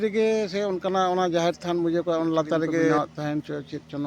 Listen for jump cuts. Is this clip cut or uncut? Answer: cut